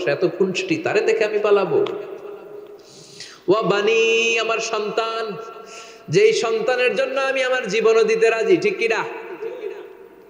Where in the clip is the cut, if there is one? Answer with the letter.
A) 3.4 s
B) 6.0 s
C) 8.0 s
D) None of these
D